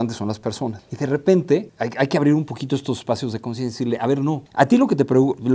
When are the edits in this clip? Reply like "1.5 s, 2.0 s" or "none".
0.8 s, 1.8 s, 4.4 s

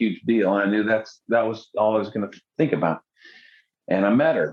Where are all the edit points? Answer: none

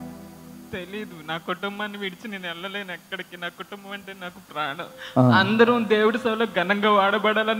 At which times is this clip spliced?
none

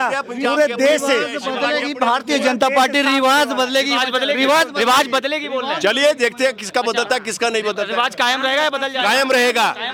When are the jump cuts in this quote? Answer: none

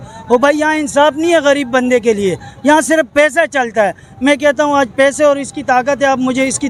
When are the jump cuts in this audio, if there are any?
none

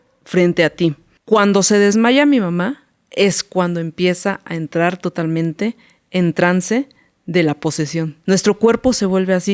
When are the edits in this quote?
1.1 s, 8.1 s

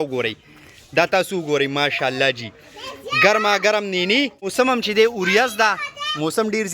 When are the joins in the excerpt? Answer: 4.5 s

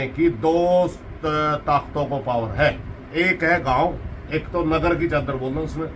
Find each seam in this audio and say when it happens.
none

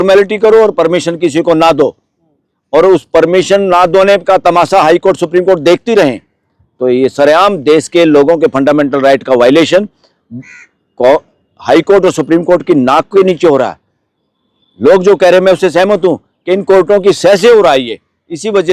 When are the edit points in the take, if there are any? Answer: none

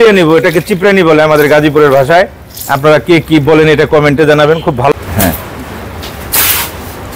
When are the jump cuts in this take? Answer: 4.9 s

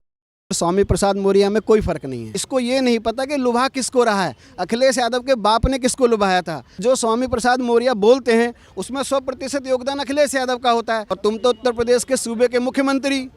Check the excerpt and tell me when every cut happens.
2.4 s, 6.7 s, 11.1 s

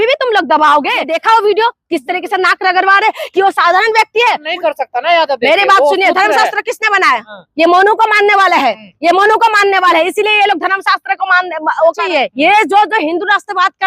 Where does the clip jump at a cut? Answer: 1.1 s, 4.5 s, 12.0 s

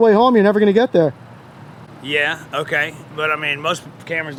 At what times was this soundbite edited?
none

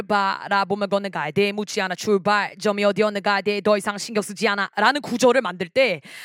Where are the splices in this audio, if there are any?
none

